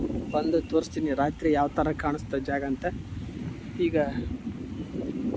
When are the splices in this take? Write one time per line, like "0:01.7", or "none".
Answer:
none